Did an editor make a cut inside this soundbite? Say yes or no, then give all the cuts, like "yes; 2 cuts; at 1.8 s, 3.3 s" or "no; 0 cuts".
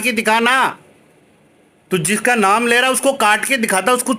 no; 0 cuts